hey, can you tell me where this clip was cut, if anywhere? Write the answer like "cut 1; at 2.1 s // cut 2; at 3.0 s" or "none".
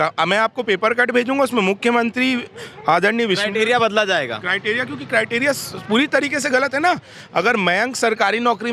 none